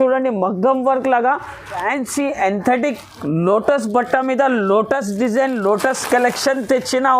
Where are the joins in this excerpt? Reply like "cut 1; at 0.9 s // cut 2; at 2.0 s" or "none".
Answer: cut 1; at 1.8 s